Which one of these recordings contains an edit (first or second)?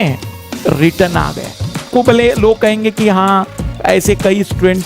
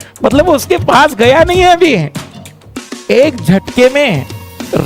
first